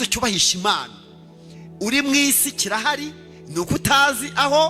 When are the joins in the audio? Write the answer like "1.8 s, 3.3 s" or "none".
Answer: none